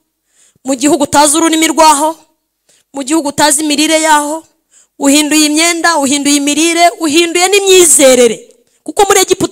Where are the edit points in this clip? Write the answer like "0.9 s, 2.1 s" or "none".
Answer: none